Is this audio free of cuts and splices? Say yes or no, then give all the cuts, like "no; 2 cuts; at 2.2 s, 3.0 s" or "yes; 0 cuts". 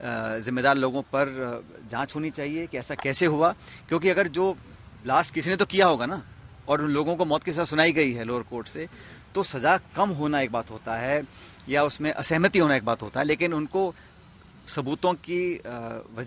yes; 0 cuts